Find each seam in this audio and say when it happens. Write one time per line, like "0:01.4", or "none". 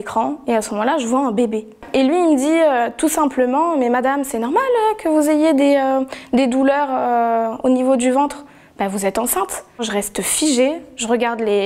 0:01.7
0:09.9

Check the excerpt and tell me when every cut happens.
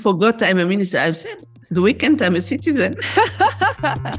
0:03.0

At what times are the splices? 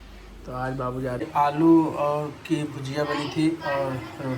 0:01.2

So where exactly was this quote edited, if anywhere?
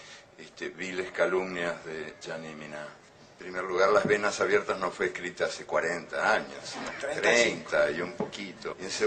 0:01.9

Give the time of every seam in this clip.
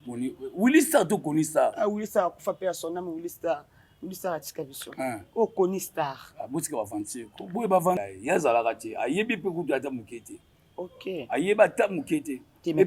0:08.0

